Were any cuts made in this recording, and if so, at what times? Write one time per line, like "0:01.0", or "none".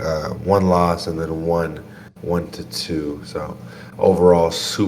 none